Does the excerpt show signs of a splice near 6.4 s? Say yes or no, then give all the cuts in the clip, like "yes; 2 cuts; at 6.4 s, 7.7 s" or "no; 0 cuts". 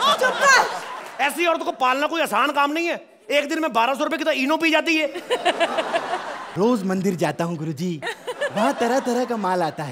yes; 1 cut; at 6.4 s